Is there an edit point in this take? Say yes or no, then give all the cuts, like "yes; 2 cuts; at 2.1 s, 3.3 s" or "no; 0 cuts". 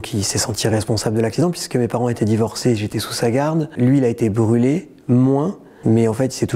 no; 0 cuts